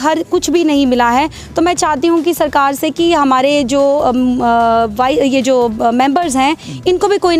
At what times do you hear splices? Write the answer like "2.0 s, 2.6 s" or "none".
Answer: none